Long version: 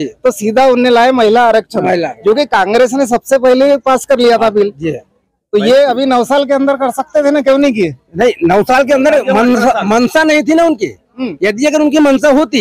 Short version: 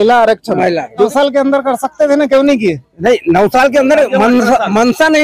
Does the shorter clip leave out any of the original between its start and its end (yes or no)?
yes